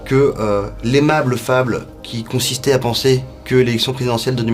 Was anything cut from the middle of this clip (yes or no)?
no